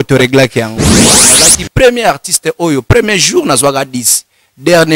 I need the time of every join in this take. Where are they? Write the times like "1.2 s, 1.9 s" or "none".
1.1 s

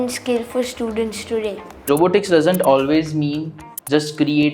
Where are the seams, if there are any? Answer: 1.9 s

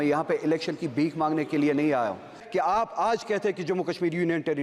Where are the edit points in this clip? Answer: 2.4 s

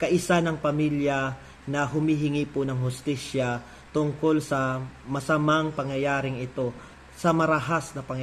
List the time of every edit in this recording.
6.9 s

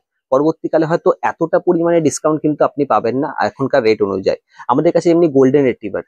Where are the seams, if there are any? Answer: none

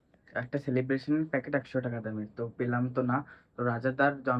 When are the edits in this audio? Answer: none

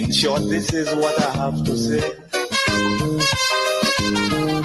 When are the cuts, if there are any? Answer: none

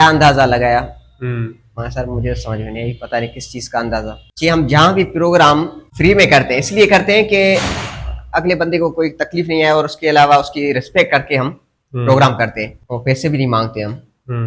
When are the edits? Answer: 4.2 s, 5.8 s, 12.8 s

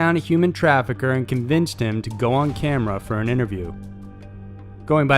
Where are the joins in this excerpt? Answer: 0.9 s

